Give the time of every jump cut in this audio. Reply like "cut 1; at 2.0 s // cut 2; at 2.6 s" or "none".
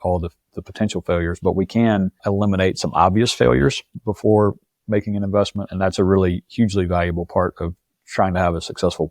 cut 1; at 2.2 s